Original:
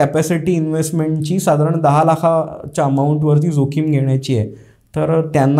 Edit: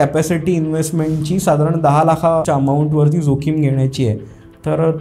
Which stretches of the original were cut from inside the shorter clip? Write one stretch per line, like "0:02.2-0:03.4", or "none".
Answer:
0:02.4-0:02.7